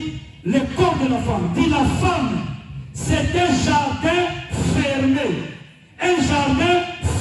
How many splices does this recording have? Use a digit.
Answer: 0